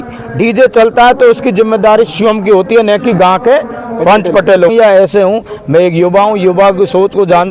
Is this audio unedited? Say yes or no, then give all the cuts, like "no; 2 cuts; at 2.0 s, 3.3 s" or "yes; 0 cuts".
no; 1 cut; at 4.7 s